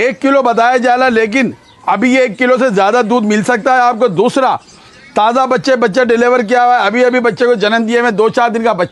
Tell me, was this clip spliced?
no; 0 cuts

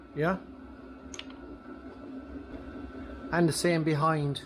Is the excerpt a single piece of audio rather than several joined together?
no; 1 cut; at 2.5 s

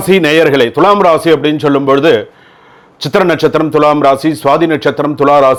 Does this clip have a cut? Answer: no; 0 cuts

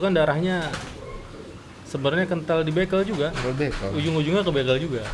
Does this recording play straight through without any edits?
yes; 0 cuts

